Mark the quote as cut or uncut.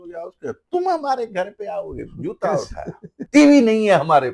cut